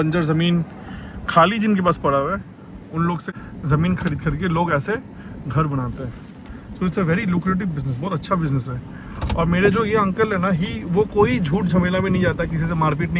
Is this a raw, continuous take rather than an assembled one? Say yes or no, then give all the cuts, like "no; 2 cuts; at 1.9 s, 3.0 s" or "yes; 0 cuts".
yes; 0 cuts